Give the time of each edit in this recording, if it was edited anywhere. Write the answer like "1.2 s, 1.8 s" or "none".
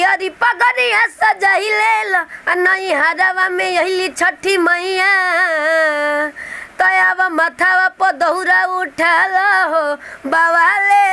none